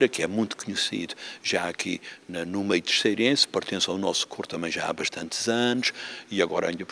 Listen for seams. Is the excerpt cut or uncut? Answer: uncut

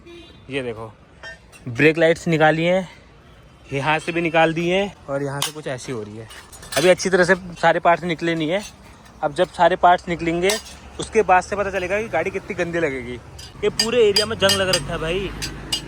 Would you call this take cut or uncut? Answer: uncut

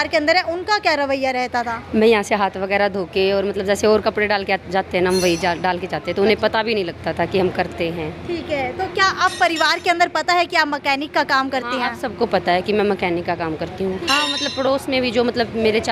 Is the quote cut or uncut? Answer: uncut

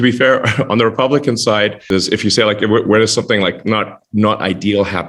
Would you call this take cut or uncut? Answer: cut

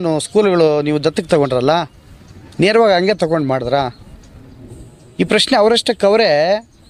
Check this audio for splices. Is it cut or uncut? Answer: uncut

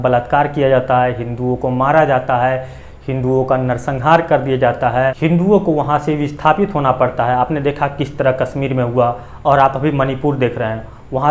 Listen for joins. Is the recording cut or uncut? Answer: cut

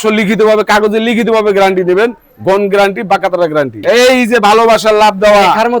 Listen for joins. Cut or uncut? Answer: cut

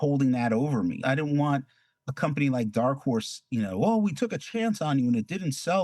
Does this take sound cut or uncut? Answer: cut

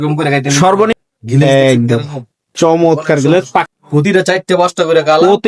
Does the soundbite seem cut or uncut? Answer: cut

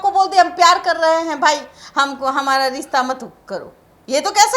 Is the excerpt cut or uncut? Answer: uncut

